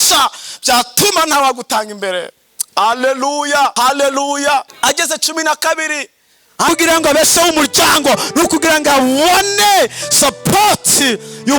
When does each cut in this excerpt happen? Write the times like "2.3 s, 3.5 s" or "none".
3.7 s, 4.7 s, 6.7 s